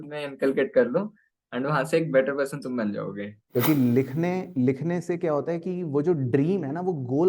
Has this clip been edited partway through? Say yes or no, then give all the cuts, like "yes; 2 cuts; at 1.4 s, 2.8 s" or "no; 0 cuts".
yes; 1 cut; at 3.4 s